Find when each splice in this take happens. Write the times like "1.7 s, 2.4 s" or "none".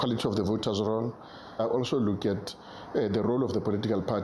1.6 s